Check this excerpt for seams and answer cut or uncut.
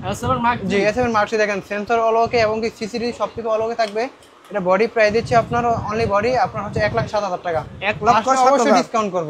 uncut